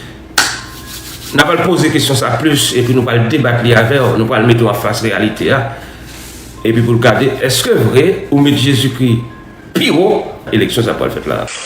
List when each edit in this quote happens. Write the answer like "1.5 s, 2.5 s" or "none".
10.5 s